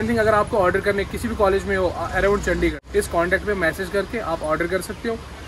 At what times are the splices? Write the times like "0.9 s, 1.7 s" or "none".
2.8 s